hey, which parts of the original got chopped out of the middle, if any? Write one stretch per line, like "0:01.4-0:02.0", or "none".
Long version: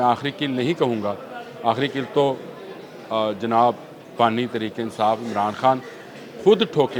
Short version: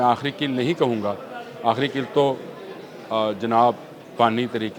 none